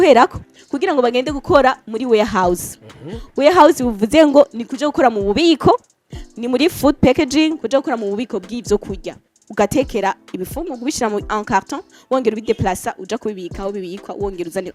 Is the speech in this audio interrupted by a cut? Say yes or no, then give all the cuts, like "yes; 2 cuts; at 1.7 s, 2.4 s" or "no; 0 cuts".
no; 0 cuts